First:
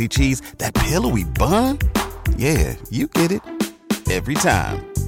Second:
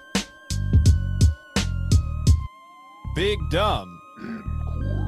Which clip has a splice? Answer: second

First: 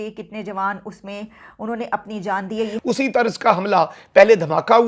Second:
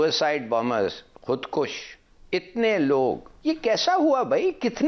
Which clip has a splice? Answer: first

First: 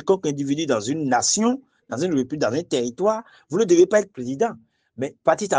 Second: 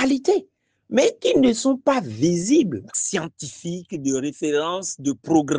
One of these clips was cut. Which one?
second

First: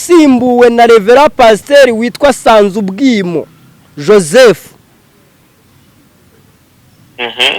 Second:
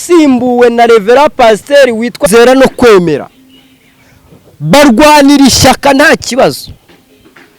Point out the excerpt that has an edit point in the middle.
second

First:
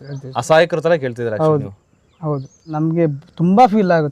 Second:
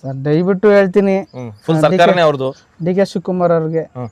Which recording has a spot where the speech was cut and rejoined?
first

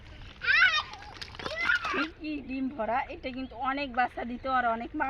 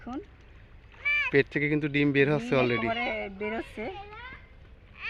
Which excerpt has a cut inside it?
first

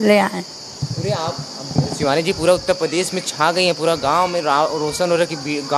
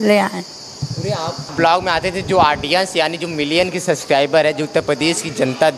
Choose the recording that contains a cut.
second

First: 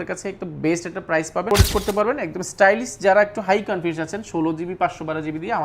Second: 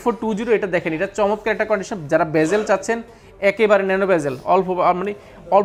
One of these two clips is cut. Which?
first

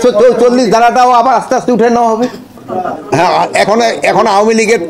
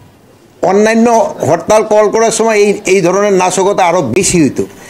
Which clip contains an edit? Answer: first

